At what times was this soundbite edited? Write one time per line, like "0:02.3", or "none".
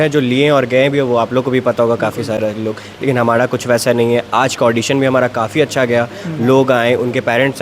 none